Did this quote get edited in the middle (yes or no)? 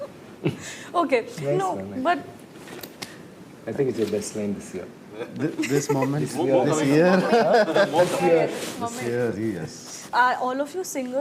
yes